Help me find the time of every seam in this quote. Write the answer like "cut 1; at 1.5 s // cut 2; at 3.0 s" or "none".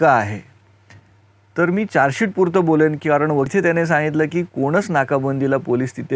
cut 1; at 3.5 s